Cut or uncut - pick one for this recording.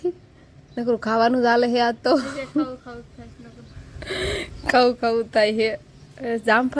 uncut